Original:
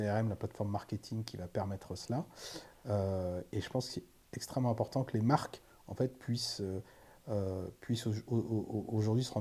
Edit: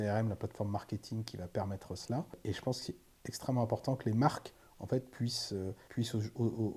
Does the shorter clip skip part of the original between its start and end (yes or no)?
yes